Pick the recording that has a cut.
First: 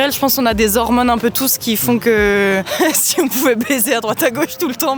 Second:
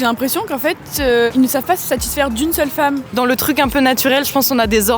second; 2 cuts; at 1.3 s, 3.1 s

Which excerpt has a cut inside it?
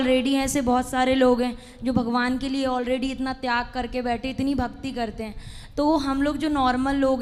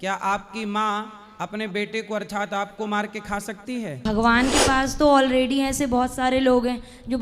second; 1 cut; at 4.1 s

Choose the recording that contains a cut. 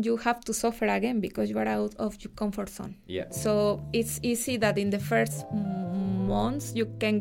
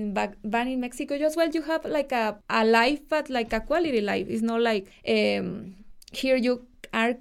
second; 2 cuts; at 2.4 s, 4.9 s

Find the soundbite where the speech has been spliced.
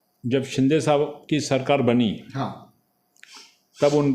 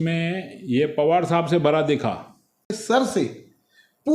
second; 1 cut; at 2.8 s

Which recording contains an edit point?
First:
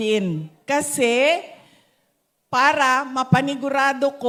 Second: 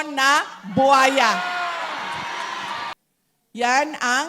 second; 1 cut; at 2.9 s

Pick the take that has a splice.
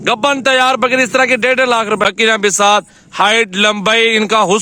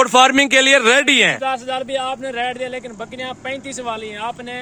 first; 1 cut; at 2.0 s

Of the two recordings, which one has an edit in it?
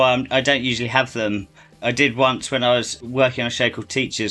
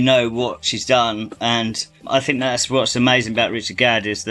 first; 2 cuts; at 1.8 s, 3.0 s

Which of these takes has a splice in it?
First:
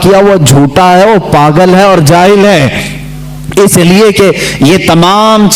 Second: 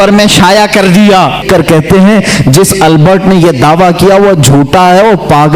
second; 1 cut; at 1.4 s

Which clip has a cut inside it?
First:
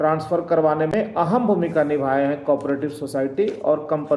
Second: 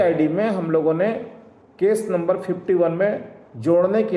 first; 1 cut; at 0.9 s

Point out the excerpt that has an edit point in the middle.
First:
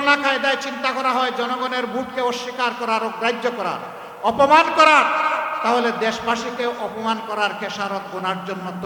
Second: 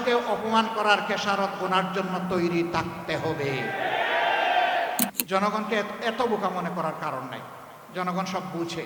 second; 1 cut; at 5.1 s

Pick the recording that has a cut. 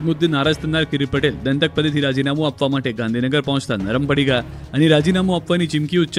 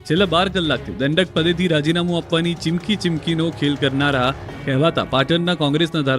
second; 1 cut; at 2.7 s

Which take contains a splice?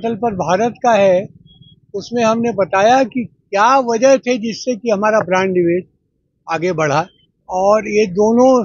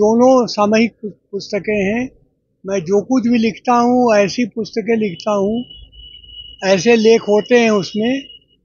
first; 1 cut; at 7.2 s

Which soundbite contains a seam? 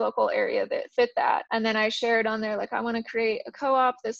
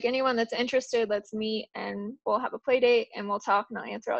first; 1 cut; at 1.5 s

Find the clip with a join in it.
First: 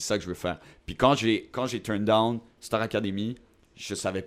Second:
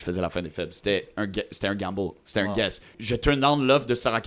second; 1 cut; at 2.9 s

